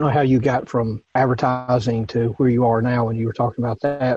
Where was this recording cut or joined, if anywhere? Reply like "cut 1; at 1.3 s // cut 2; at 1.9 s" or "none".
cut 1; at 1.1 s